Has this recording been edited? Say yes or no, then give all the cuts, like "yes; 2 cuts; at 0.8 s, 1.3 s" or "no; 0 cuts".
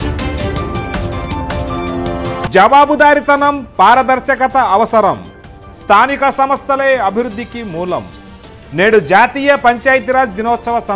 yes; 1 cut; at 2.4 s